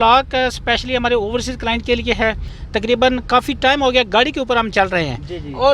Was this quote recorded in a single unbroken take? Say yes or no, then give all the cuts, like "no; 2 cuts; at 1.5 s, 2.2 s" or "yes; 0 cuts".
no; 1 cut; at 2.6 s